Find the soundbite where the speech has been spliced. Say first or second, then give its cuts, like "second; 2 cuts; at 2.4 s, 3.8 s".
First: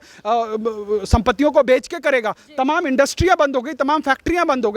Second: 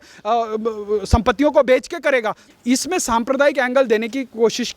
second; 1 cut; at 2.4 s